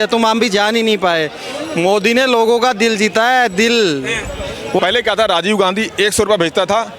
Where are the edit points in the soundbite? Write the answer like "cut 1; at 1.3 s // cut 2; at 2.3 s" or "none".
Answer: cut 1; at 4.7 s